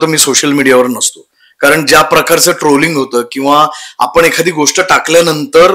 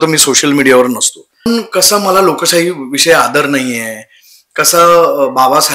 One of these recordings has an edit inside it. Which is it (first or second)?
second